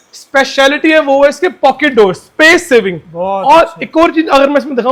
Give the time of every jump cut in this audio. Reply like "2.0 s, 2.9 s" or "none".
none